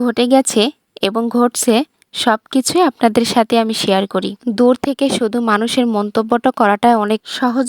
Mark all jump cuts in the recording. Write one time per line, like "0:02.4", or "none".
0:04.4

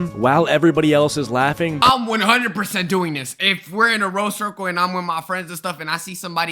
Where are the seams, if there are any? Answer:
0:01.8

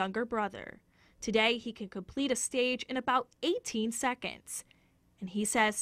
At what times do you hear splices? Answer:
0:01.1

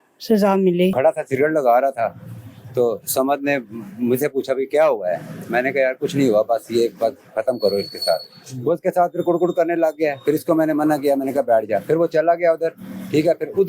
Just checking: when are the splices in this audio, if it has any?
0:00.9

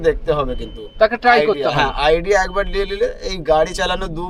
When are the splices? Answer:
none

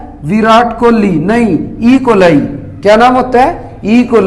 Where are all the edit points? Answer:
none

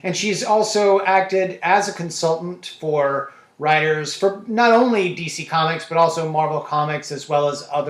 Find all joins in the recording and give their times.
0:01.1

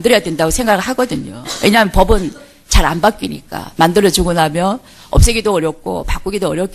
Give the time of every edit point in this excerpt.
0:01.0

